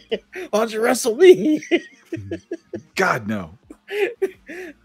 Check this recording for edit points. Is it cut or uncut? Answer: uncut